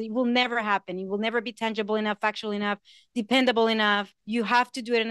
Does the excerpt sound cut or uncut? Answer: cut